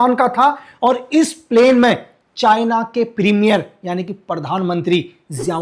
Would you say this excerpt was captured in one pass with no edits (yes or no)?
yes